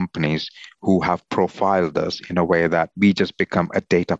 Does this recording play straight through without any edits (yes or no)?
no